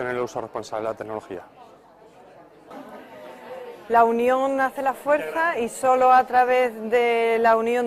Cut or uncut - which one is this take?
uncut